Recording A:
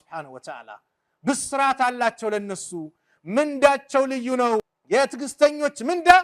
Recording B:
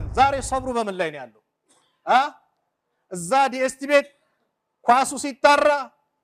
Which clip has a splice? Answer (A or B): A